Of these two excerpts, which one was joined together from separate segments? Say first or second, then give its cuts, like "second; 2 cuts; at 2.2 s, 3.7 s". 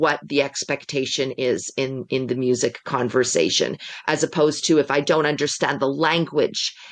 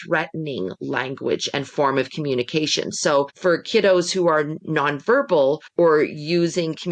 second; 2 cuts; at 3.3 s, 5.6 s